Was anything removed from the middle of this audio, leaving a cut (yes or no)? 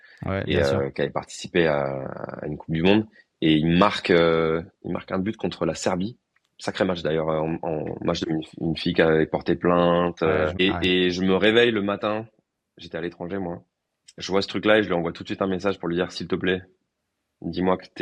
yes